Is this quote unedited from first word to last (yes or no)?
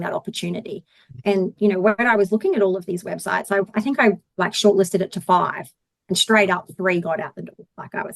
no